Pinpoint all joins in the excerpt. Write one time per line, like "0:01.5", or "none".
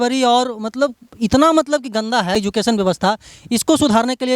0:02.3